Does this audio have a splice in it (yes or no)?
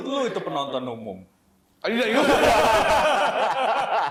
no